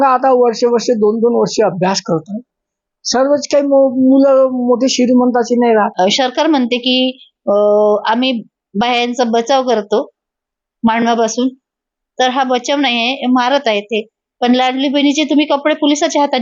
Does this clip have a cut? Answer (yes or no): yes